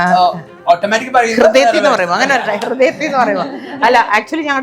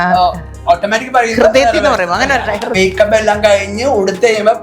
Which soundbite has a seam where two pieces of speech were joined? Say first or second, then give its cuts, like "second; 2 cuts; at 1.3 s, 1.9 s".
second; 1 cut; at 2.7 s